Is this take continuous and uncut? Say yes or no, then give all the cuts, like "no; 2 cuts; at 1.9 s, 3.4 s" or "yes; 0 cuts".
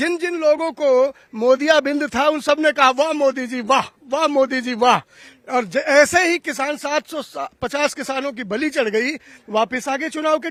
yes; 0 cuts